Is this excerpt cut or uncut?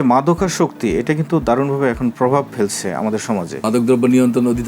cut